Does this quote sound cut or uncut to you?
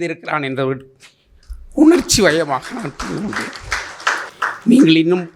uncut